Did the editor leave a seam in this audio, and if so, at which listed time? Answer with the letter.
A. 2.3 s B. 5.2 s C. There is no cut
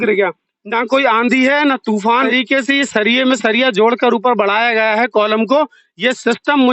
A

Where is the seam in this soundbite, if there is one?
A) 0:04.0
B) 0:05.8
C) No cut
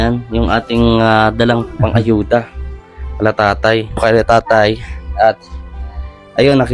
A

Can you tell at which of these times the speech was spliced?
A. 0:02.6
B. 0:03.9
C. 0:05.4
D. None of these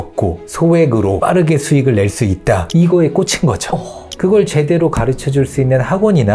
D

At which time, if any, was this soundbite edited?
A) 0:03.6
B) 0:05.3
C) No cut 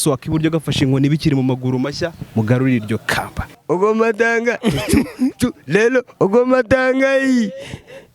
A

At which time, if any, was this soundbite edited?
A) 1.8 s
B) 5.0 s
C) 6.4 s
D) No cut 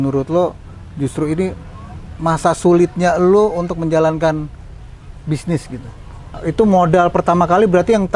C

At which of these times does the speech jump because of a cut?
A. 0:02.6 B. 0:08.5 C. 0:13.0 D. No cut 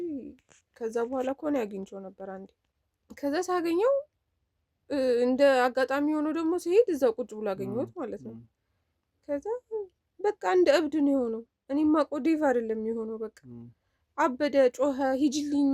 A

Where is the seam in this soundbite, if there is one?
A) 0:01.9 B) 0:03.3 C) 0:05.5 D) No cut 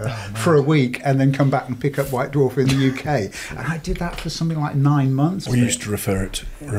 C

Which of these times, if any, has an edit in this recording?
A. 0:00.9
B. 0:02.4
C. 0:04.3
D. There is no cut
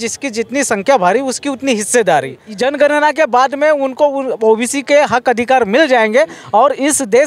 B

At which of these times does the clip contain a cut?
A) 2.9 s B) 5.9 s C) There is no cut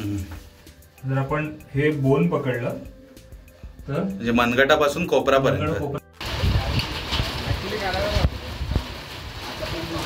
B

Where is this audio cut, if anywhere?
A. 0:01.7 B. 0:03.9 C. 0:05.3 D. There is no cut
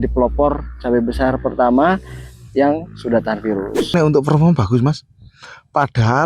B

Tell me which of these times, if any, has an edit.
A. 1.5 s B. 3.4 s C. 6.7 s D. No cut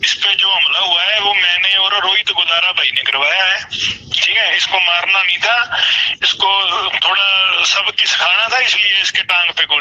A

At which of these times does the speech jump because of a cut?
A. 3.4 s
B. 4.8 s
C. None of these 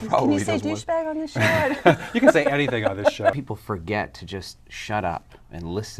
A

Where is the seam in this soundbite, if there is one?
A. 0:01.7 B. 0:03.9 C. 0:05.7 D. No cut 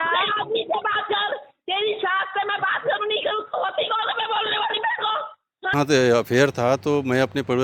C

